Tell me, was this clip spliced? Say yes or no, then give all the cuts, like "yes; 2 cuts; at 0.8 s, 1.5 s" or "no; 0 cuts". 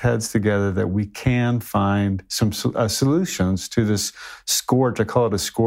no; 0 cuts